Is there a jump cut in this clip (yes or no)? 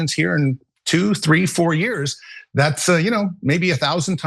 no